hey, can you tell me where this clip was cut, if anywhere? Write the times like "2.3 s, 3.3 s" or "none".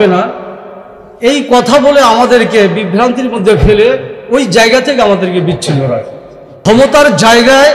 6.6 s